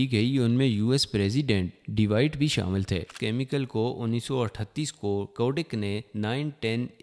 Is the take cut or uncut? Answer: cut